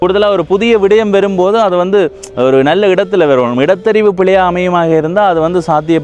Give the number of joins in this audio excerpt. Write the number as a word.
zero